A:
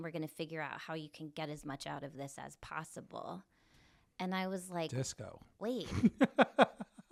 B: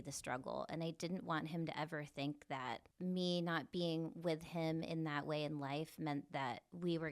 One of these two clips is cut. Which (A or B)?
B